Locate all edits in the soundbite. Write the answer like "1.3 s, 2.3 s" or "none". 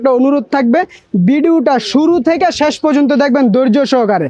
none